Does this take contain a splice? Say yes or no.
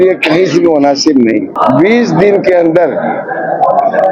yes